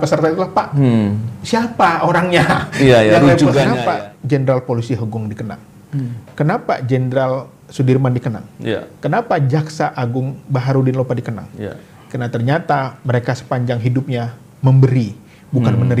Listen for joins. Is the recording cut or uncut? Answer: cut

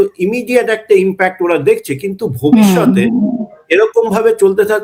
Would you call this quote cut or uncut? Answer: uncut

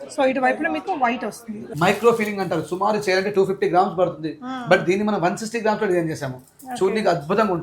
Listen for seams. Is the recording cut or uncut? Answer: cut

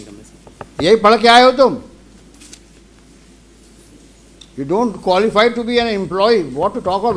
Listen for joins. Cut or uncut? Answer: uncut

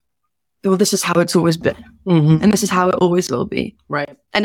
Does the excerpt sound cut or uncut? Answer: uncut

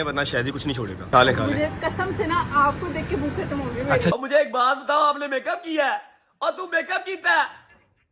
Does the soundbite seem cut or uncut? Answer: cut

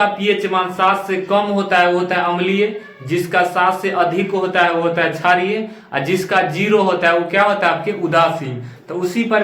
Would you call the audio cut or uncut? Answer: uncut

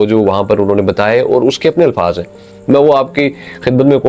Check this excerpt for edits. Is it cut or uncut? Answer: uncut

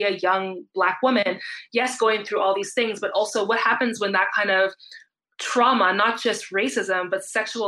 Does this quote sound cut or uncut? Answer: uncut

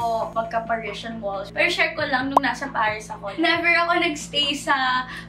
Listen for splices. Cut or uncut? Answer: cut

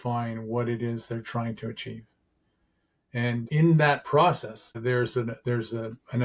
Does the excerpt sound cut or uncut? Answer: cut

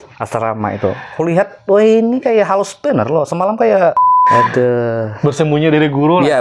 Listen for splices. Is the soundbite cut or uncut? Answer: cut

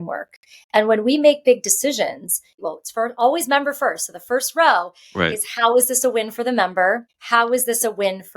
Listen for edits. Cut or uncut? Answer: cut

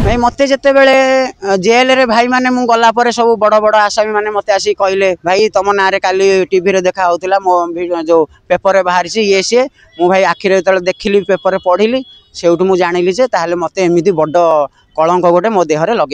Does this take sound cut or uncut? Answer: uncut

